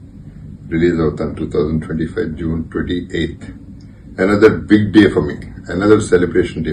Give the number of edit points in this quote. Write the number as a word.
zero